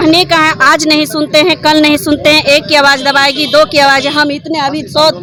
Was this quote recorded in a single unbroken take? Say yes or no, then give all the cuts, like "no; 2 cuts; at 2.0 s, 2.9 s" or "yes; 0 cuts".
yes; 0 cuts